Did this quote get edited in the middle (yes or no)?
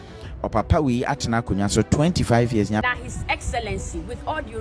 yes